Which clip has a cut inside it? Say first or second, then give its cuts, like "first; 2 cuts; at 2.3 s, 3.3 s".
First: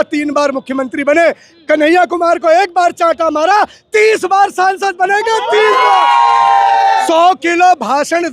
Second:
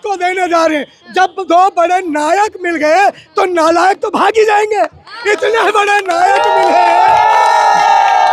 first; 1 cut; at 7.0 s